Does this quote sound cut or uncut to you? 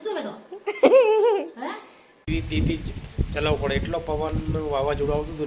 cut